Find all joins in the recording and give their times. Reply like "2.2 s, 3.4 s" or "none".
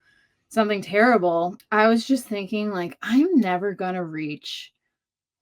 1.6 s